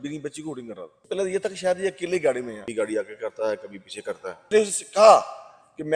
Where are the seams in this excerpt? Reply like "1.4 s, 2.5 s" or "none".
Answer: 1.1 s, 2.6 s, 4.5 s

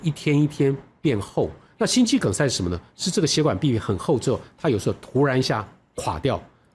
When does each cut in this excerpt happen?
1.6 s

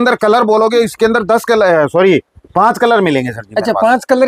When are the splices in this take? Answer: none

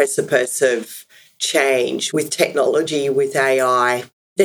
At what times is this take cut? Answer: 2.0 s

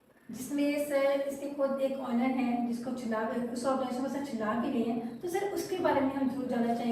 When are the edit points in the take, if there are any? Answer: none

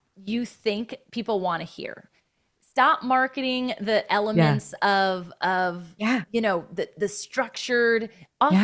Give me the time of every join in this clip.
none

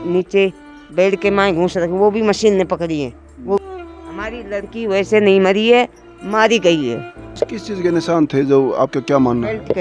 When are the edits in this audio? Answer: 3.6 s, 7.3 s

